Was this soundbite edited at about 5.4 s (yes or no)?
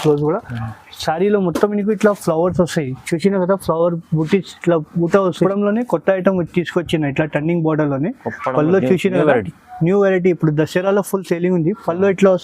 yes